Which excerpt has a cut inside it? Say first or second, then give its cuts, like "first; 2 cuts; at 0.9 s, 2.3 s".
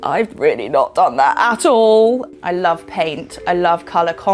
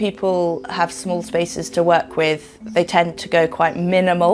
first; 1 cut; at 2.2 s